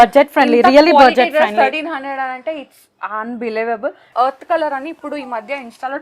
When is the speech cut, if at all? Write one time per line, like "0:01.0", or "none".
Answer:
0:04.1

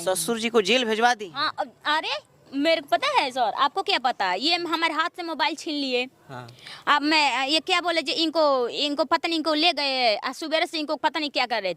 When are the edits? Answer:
none

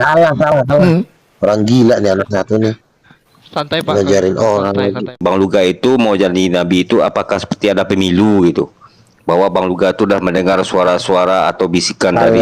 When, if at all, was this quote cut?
0:05.2

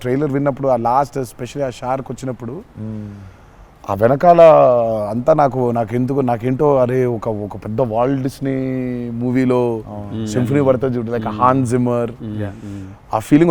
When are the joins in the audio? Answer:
none

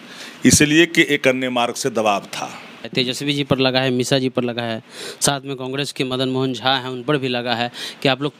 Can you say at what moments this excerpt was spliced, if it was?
0:02.9

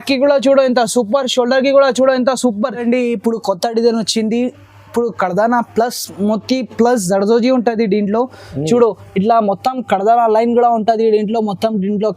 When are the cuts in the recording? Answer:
0:02.7

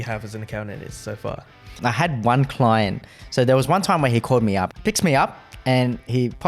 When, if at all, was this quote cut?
0:01.7
0:03.1
0:04.7

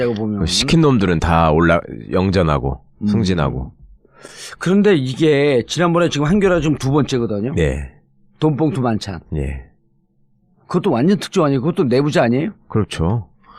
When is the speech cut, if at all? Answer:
0:01.7

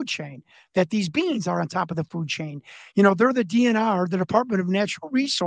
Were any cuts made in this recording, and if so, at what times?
none

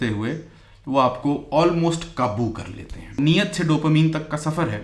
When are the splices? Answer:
0:03.1

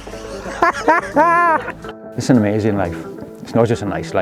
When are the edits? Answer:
0:02.1

